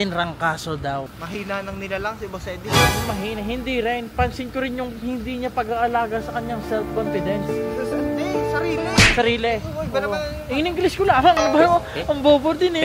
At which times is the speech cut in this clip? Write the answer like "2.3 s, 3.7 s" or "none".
1.2 s

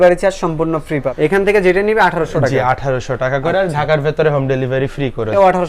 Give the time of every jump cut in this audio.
none

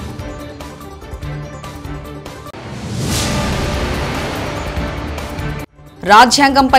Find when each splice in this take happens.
5.8 s

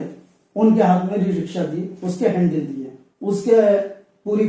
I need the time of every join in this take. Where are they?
none

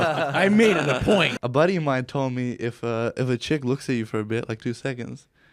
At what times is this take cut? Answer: 1.4 s

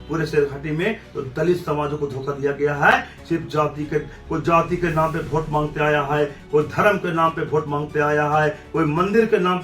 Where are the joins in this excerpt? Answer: none

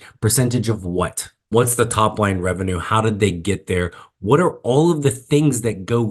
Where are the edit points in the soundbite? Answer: 1.5 s

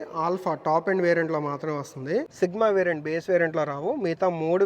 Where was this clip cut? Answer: 2.3 s

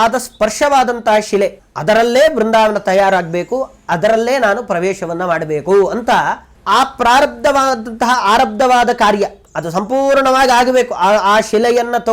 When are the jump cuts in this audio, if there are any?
1.7 s

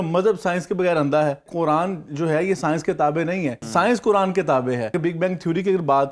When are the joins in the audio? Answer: 1.5 s, 3.6 s, 4.9 s

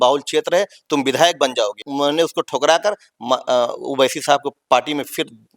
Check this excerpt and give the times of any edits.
1.8 s

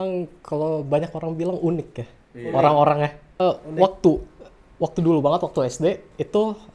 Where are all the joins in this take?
3.4 s

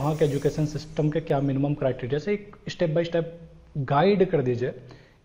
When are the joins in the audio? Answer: none

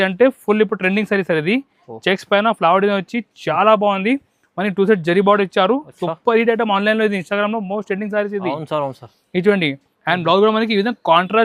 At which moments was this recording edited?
none

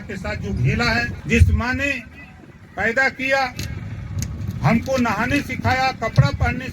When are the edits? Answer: 1.2 s

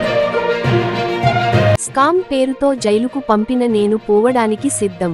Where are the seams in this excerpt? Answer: 1.6 s

